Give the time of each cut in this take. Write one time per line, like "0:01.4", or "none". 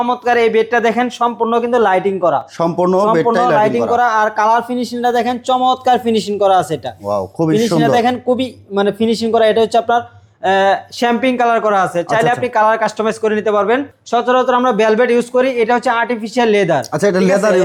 none